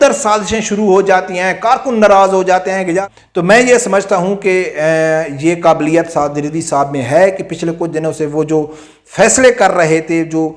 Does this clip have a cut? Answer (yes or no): yes